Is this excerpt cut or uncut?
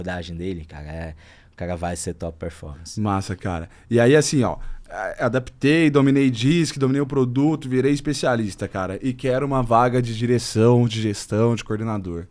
uncut